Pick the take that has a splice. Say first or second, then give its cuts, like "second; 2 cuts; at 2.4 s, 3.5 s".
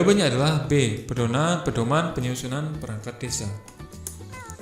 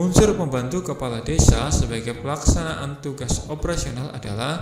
first; 1 cut; at 3.6 s